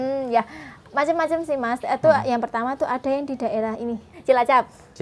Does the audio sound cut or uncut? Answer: cut